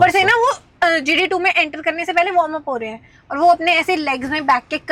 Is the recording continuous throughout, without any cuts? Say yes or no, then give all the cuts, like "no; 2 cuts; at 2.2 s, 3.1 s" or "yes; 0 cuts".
yes; 0 cuts